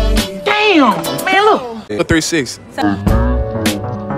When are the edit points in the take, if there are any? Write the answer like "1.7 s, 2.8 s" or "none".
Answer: 2.0 s